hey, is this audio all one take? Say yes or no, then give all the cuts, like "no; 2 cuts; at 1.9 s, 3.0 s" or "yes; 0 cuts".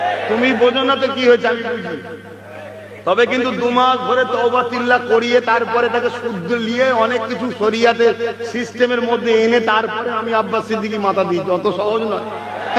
yes; 0 cuts